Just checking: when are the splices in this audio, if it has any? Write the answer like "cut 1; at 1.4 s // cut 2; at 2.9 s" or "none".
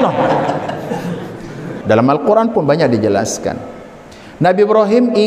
cut 1; at 1.7 s